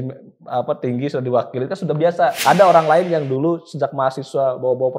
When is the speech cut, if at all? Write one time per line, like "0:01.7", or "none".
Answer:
0:02.4